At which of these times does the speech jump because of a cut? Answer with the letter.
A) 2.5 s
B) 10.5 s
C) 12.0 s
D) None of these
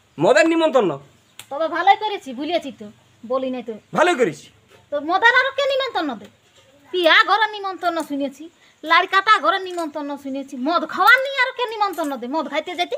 B